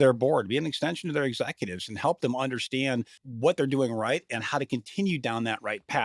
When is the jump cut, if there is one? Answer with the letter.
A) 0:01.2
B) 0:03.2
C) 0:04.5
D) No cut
B